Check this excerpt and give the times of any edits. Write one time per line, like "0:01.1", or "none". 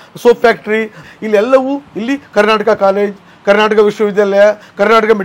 0:01.0